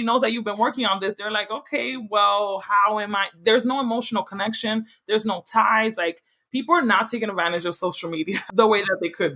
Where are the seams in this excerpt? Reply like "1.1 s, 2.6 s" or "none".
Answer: 8.4 s